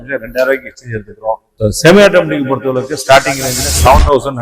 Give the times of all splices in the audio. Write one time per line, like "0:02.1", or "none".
0:01.5